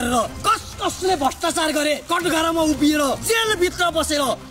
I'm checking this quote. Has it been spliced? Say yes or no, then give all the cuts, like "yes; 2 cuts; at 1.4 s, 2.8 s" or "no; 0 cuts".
no; 0 cuts